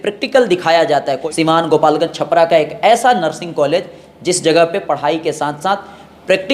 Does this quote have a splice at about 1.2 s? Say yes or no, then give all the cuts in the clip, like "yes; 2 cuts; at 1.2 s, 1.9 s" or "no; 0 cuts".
yes; 1 cut; at 1.2 s